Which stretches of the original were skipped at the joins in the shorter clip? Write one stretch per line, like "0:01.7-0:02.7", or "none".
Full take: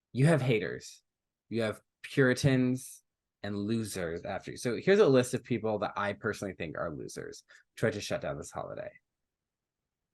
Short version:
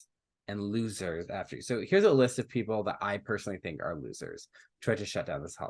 none